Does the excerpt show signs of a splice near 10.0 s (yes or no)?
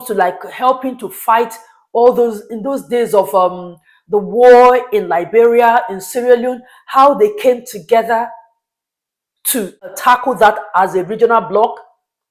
yes